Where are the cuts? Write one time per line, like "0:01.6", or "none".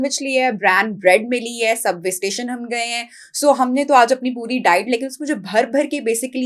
none